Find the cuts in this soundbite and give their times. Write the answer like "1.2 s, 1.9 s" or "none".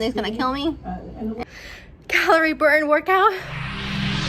1.4 s